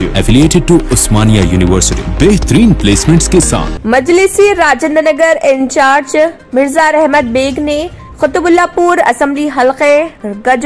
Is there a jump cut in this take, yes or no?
yes